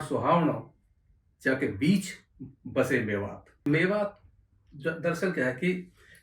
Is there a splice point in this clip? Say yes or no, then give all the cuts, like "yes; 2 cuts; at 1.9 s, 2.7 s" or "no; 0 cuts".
yes; 1 cut; at 3.5 s